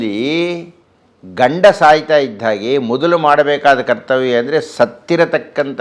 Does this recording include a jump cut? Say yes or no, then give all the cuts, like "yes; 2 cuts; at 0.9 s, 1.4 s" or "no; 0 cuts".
no; 0 cuts